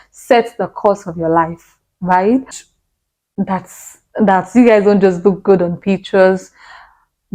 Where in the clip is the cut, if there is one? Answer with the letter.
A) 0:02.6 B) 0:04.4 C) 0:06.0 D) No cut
A